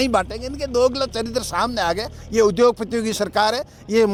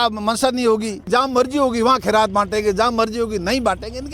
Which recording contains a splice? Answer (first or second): second